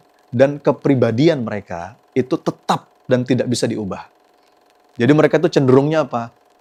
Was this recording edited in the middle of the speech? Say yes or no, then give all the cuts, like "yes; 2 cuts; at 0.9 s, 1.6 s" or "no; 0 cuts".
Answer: no; 0 cuts